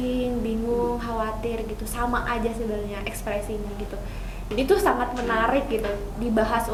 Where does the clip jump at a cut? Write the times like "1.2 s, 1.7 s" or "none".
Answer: none